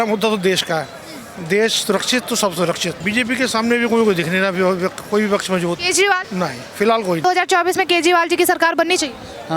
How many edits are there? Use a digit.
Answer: 3